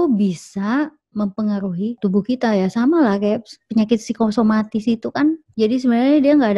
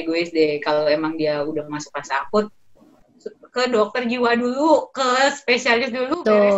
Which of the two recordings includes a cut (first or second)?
first